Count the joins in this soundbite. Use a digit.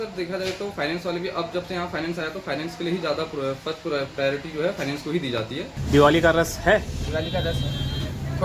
1